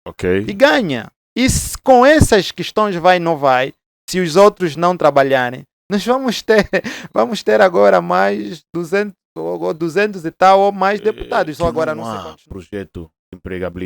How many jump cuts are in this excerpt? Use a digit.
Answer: 1